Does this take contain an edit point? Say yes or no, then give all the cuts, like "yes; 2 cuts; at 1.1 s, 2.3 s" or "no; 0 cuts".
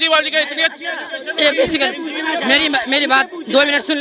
no; 0 cuts